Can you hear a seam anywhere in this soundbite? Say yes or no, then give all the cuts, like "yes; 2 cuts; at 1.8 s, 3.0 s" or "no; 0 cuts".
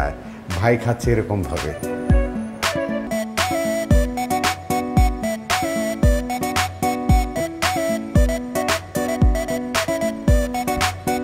yes; 1 cut; at 3.1 s